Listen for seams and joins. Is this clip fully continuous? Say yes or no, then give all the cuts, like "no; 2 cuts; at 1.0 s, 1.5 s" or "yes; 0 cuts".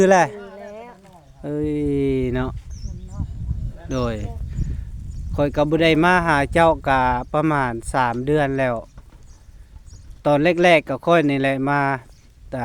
yes; 0 cuts